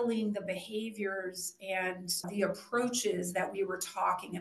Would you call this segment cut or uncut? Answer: cut